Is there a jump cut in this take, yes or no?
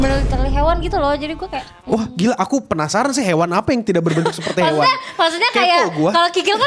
no